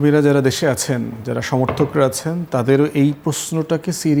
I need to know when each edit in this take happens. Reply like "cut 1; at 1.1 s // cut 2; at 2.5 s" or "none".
none